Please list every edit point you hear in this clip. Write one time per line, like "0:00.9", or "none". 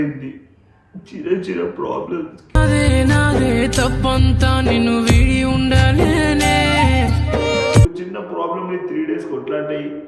0:07.9